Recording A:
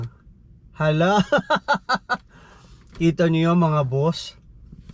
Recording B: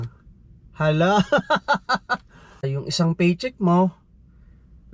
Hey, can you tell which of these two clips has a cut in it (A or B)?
B